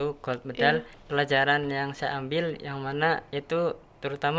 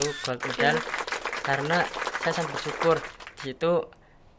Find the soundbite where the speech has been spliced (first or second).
first